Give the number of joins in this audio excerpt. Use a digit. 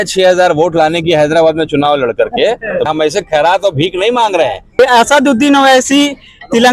2